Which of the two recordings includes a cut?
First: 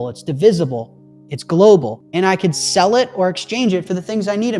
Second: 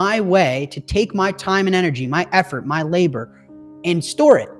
first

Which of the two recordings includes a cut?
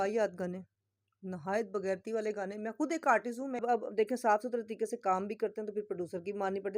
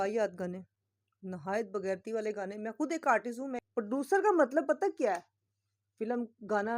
second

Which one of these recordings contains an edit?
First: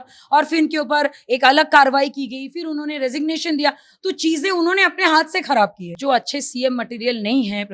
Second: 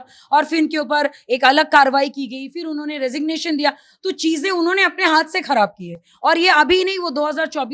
first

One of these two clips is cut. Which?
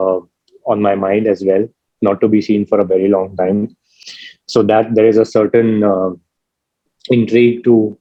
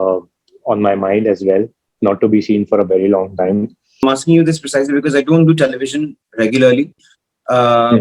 second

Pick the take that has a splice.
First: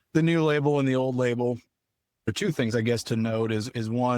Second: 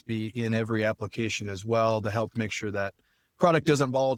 first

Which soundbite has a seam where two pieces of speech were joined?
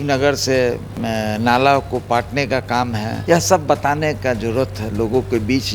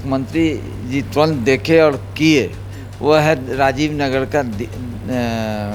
first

